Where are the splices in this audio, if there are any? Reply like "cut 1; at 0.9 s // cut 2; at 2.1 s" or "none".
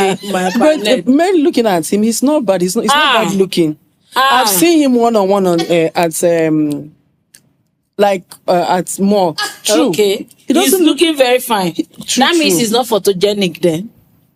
none

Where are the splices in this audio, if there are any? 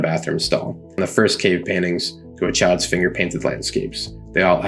cut 1; at 1.0 s

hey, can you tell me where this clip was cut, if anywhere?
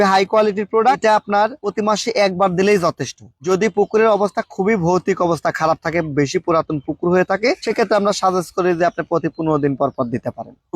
cut 1; at 1.0 s

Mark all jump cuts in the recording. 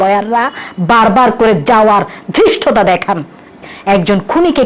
cut 1; at 3.6 s

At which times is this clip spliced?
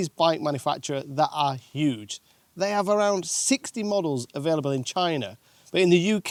none

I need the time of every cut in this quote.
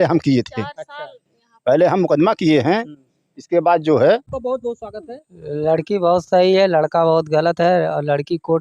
cut 1; at 4.3 s

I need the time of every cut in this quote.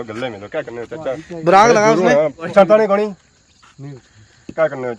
cut 1; at 2.4 s

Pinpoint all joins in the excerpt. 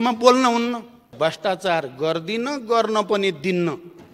cut 1; at 1.2 s

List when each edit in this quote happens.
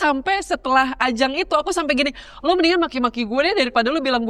none

